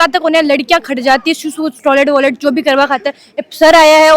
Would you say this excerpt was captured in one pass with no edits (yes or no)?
yes